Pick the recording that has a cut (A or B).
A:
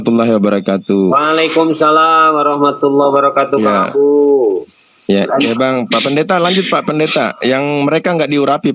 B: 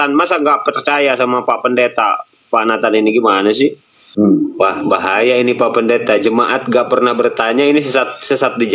B